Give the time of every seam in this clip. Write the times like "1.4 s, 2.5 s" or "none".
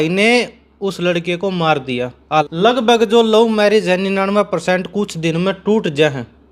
2.2 s